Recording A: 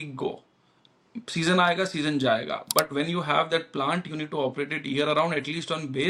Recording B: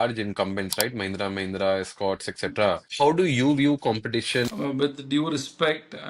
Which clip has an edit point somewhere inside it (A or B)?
B